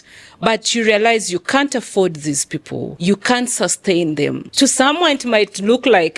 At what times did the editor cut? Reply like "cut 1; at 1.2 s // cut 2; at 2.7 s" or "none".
cut 1; at 2.8 s // cut 2; at 4.5 s